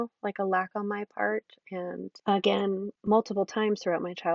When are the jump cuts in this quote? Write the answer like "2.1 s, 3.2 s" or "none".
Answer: 2.1 s, 2.9 s